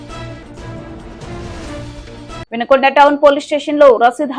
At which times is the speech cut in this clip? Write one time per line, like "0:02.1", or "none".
none